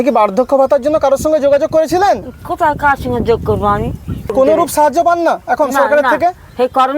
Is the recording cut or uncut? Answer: cut